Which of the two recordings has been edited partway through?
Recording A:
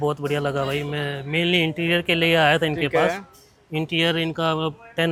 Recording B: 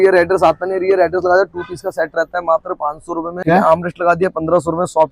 B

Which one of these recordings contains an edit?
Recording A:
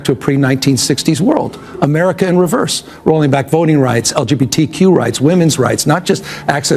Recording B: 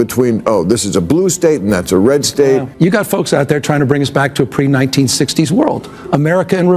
B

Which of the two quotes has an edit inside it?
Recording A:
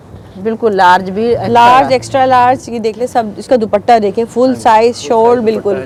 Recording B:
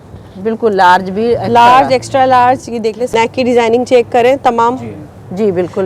B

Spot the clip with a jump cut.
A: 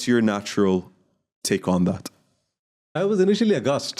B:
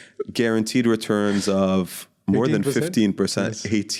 A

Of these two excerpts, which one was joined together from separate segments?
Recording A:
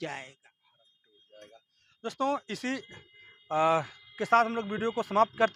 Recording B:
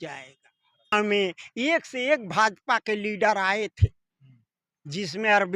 B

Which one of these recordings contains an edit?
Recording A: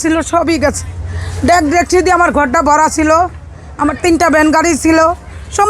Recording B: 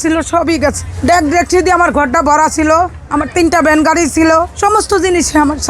B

